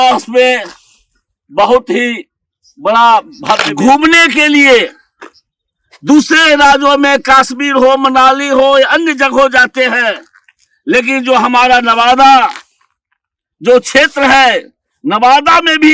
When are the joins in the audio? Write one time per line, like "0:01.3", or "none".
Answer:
0:03.7